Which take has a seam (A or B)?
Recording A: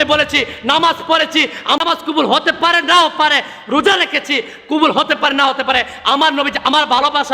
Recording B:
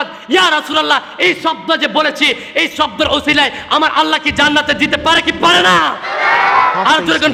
A